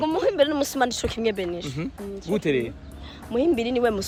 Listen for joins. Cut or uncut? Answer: uncut